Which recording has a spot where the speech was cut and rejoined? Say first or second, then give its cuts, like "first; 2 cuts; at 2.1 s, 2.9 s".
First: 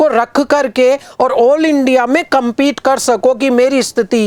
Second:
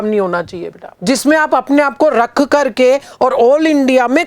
second; 1 cut; at 0.9 s